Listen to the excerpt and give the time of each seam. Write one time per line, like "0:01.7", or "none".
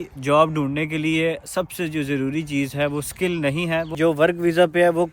0:03.9